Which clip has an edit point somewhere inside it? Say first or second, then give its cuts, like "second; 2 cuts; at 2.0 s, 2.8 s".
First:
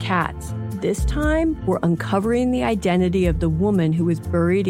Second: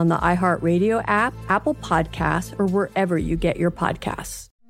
second; 1 cut; at 1.4 s